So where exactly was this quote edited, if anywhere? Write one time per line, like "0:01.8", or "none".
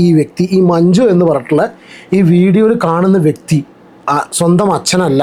none